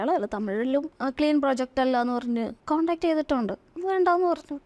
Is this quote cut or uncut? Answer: cut